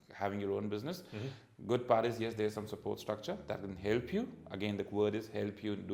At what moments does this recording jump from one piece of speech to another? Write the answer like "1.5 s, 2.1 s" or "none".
none